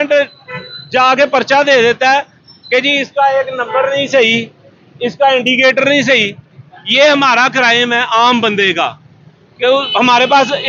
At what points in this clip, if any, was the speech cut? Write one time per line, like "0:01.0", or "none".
none